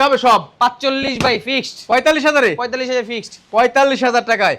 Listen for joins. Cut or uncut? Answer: uncut